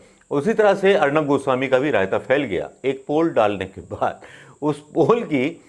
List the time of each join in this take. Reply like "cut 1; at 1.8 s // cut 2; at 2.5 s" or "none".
none